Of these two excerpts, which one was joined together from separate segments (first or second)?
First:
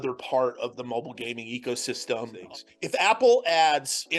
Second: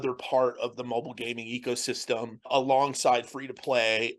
first